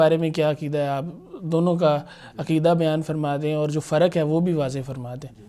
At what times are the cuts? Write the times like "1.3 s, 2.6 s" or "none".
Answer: none